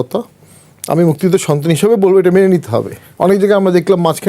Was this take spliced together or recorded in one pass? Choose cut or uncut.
cut